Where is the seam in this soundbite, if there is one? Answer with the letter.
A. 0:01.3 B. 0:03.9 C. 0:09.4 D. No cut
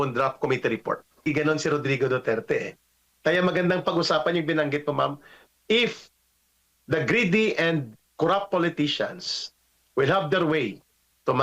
A